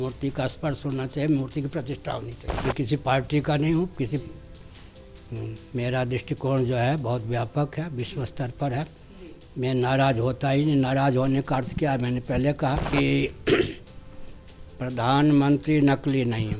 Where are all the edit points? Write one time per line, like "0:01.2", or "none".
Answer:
0:02.7
0:12.9